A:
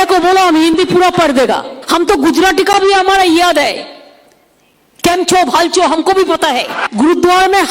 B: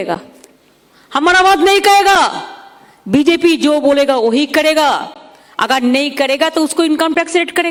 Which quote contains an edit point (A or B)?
A